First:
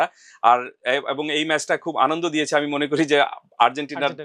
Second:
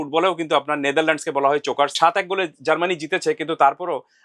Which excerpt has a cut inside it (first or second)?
second